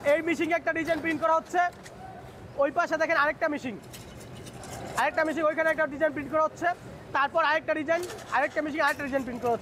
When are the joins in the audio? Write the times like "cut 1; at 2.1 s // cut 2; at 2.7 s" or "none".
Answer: none